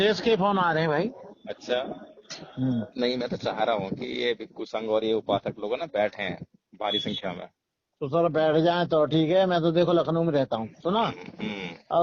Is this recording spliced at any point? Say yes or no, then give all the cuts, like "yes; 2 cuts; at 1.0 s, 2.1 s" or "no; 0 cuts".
yes; 1 cut; at 2.9 s